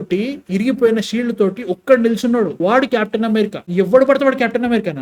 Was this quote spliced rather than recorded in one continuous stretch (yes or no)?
no